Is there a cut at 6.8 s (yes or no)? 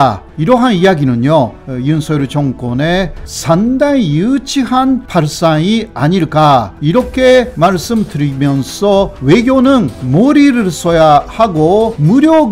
no